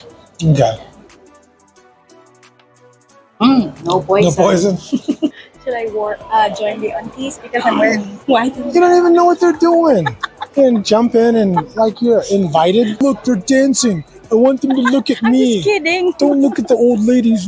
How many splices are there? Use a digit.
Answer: 2